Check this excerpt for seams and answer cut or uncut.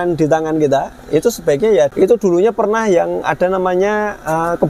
cut